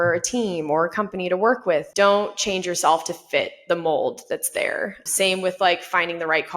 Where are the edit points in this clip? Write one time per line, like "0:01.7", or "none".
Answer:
0:01.9
0:05.0